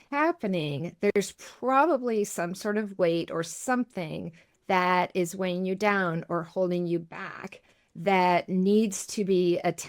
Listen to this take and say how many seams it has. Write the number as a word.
zero